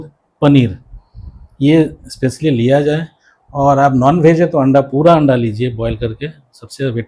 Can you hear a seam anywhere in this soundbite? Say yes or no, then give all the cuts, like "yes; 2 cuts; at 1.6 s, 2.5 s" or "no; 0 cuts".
no; 0 cuts